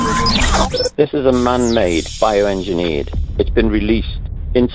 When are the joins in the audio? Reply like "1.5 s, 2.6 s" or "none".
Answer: 0.9 s